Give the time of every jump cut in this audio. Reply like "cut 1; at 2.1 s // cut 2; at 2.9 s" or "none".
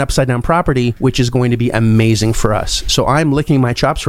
cut 1; at 0.9 s